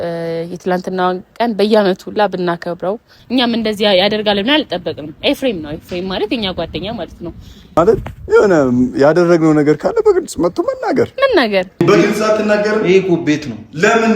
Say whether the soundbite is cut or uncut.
cut